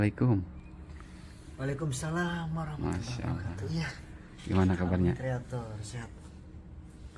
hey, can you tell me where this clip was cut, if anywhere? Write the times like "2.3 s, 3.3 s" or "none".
none